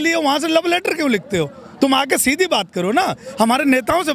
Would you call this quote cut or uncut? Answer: uncut